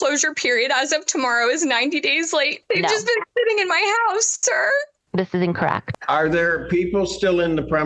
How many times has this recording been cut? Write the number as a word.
two